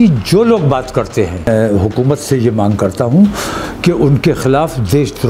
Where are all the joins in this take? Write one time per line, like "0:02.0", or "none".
0:01.5